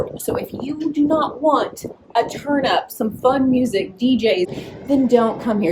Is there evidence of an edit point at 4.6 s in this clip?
yes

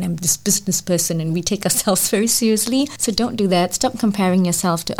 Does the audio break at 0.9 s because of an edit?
no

